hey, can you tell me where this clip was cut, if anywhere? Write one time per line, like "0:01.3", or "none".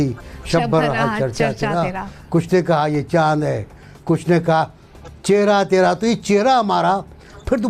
none